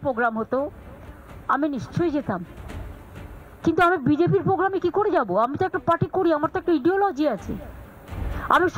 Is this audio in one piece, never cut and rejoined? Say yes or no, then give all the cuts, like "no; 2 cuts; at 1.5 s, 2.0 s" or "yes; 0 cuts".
yes; 0 cuts